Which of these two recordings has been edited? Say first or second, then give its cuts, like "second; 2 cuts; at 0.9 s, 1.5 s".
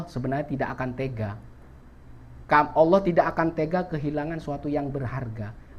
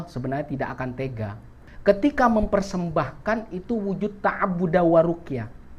second; 1 cut; at 1.7 s